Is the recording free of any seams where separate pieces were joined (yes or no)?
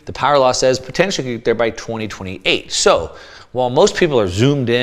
yes